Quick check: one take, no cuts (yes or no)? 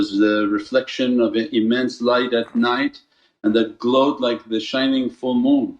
no